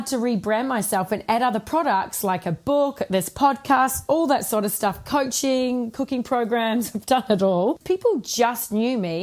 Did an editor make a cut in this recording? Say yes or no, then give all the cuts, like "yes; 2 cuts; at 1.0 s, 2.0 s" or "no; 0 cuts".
yes; 1 cut; at 7.8 s